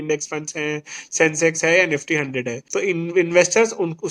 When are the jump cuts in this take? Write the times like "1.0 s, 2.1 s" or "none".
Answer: 2.6 s